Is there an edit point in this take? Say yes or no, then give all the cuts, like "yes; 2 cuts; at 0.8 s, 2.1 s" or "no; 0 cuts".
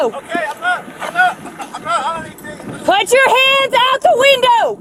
no; 0 cuts